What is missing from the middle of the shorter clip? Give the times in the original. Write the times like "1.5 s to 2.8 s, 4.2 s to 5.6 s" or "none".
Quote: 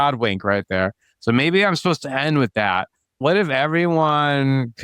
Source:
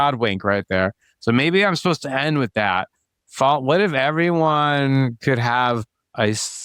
3.2 s to 3.6 s